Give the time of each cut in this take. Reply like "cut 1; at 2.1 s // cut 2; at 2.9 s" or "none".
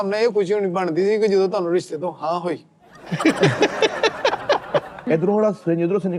cut 1; at 3.1 s // cut 2; at 5.1 s